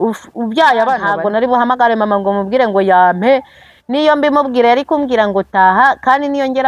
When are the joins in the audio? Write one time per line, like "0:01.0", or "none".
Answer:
0:01.1